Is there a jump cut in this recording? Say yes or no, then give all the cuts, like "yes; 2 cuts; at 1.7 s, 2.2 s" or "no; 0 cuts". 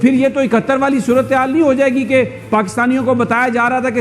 no; 0 cuts